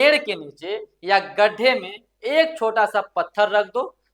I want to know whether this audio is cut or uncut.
uncut